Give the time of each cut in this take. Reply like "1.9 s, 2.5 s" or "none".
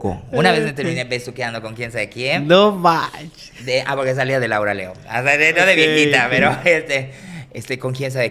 none

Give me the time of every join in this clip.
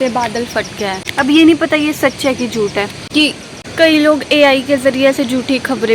1.0 s, 3.5 s

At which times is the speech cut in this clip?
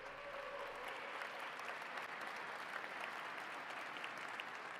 none

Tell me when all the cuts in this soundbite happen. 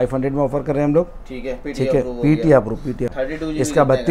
3.1 s

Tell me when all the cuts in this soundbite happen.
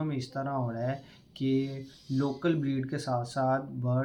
none

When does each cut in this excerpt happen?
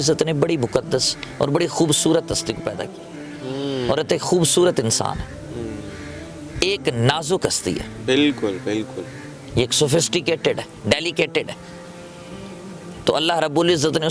none

